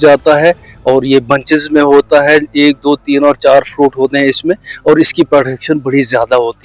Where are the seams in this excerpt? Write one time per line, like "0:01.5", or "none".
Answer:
none